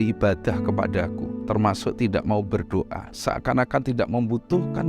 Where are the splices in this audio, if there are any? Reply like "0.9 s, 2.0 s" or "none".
1.3 s